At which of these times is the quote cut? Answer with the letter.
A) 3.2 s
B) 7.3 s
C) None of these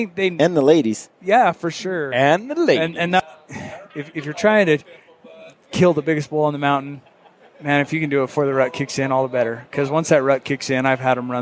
A